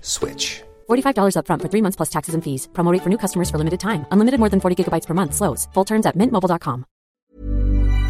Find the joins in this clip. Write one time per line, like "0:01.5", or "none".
0:07.1